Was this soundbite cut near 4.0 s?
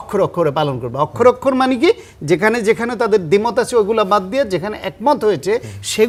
no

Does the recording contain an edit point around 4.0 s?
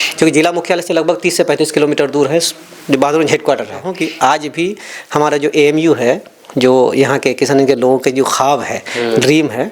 yes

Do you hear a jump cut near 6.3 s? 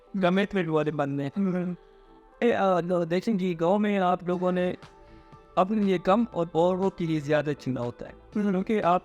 no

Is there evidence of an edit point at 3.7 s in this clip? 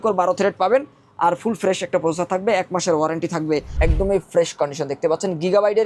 yes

